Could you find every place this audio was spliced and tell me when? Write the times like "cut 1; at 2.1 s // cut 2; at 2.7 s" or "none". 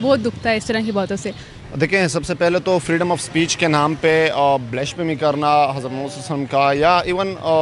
cut 1; at 1.5 s